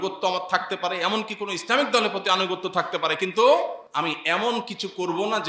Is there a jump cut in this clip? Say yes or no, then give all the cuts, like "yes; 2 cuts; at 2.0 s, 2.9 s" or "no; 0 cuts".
yes; 1 cut; at 3.8 s